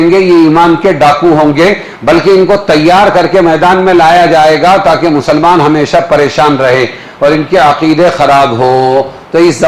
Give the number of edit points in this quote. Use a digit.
0